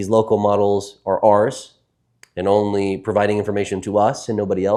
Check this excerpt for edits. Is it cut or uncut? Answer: uncut